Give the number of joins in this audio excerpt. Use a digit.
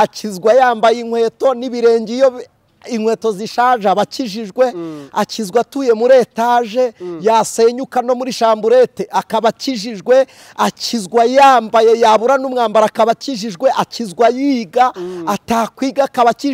0